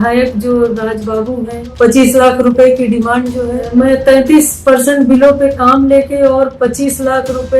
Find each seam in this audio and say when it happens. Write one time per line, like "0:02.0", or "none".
0:01.6
0:03.6